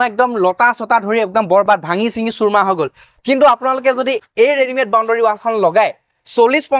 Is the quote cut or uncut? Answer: uncut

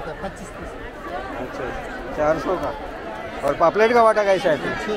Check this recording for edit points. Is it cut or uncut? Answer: uncut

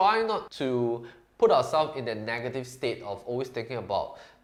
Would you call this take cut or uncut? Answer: uncut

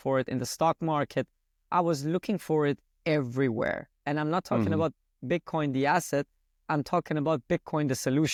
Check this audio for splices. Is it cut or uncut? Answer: uncut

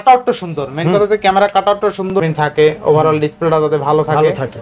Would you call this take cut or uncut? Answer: cut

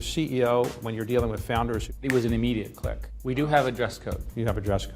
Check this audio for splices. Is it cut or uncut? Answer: cut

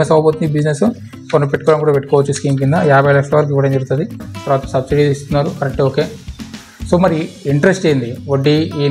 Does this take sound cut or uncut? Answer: cut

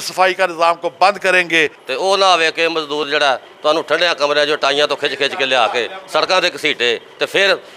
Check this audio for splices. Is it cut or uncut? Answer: cut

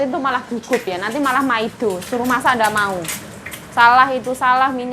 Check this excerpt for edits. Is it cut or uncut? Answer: uncut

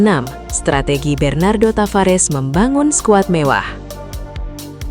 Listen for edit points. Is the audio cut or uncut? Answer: cut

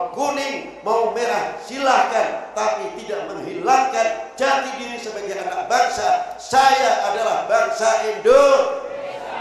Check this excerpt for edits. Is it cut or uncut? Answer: uncut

